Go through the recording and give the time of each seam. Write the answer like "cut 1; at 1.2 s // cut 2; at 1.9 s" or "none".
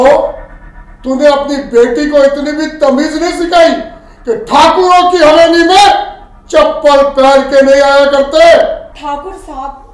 cut 1; at 8.9 s

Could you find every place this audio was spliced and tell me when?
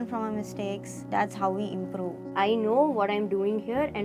cut 1; at 0.9 s // cut 2; at 2.3 s

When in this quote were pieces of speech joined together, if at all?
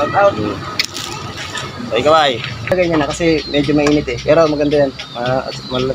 cut 1; at 2.7 s

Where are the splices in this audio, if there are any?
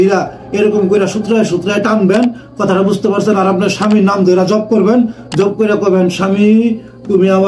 none

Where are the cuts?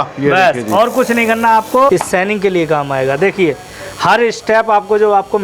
cut 1; at 1.9 s

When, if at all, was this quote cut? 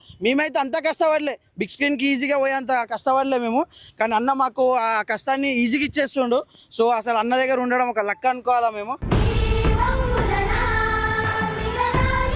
none

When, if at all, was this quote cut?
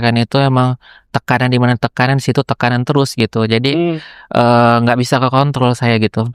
none

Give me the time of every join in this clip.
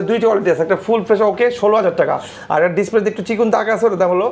none

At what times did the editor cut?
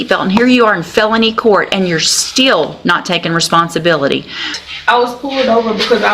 cut 1; at 4.5 s

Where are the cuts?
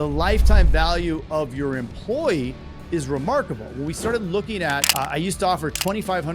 cut 1; at 4.9 s

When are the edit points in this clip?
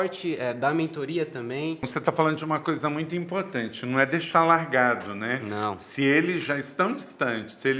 cut 1; at 1.9 s

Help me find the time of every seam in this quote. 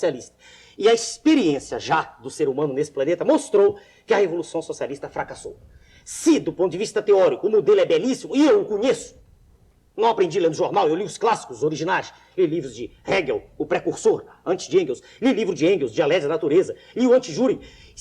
cut 1; at 12.5 s

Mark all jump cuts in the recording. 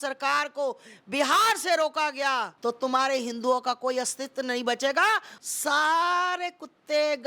cut 1; at 2.5 s // cut 2; at 5.3 s

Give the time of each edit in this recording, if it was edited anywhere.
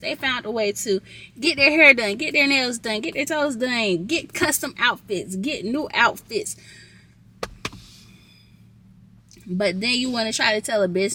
none

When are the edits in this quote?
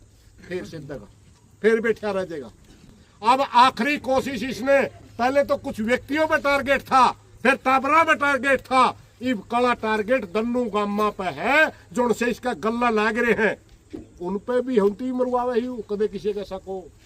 none

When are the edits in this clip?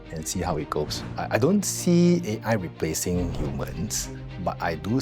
cut 1; at 1.0 s

